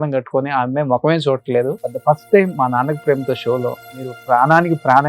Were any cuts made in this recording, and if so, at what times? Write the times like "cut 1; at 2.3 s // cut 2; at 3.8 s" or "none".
cut 1; at 1.9 s // cut 2; at 4.1 s